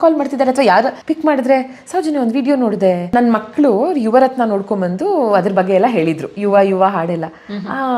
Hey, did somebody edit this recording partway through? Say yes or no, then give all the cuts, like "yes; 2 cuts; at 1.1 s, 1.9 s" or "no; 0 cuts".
yes; 2 cuts; at 1.0 s, 3.1 s